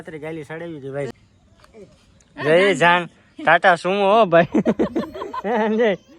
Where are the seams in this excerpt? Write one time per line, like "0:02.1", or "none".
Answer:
0:01.1